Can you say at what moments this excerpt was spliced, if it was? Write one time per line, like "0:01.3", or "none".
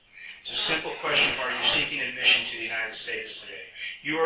none